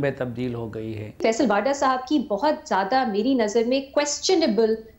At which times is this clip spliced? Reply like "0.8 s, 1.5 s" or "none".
1.2 s